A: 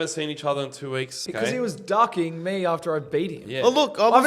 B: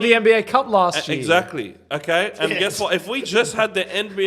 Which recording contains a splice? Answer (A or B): A